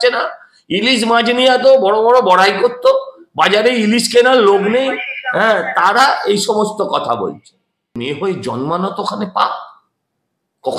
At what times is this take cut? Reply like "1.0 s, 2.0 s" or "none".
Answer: 7.9 s